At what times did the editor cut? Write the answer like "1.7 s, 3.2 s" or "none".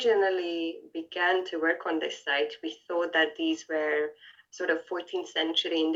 none